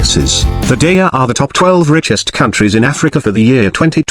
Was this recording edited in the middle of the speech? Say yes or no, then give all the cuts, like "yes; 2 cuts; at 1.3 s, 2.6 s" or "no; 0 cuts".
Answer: yes; 1 cut; at 0.9 s